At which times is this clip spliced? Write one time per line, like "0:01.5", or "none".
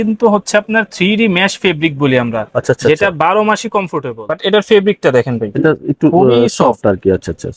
0:04.0